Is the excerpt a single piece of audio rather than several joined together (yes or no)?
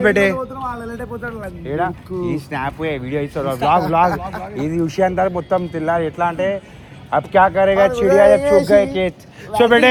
yes